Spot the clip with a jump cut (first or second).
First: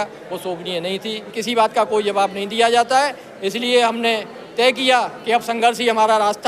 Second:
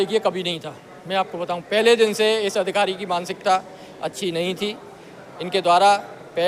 first